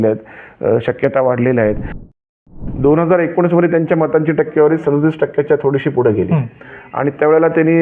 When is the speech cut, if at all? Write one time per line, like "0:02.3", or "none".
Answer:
0:02.0